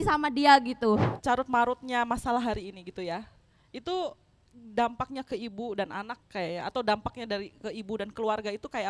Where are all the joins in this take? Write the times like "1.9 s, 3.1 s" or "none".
1.1 s